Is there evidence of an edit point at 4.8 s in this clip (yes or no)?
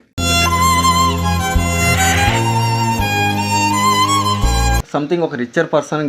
yes